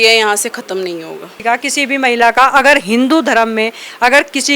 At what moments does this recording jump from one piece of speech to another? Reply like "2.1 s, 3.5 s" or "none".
1.3 s